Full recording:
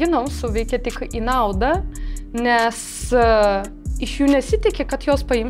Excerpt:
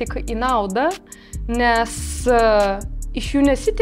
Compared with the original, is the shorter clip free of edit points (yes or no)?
yes